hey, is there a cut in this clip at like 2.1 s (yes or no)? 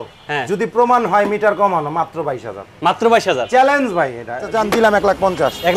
no